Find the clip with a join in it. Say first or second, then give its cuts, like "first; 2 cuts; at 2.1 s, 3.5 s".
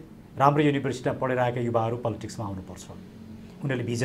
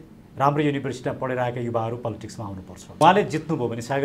second; 1 cut; at 2.9 s